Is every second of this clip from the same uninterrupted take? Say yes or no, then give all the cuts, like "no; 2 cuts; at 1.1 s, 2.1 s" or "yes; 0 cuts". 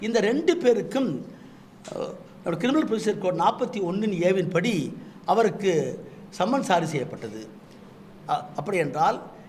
yes; 0 cuts